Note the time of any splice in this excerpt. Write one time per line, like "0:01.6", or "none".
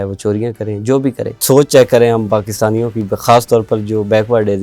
0:01.4